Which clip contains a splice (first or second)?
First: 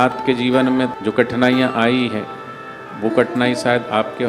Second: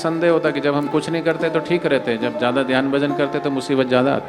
first